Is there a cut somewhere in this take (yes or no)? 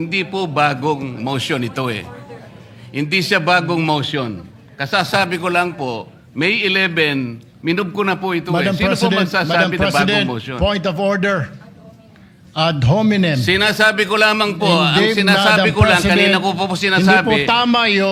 no